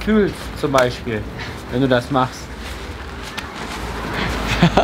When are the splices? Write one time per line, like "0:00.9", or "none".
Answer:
none